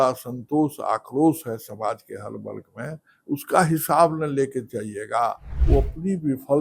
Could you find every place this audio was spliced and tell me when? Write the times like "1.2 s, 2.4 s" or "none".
5.5 s